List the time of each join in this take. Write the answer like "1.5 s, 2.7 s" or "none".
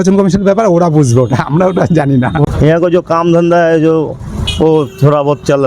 2.4 s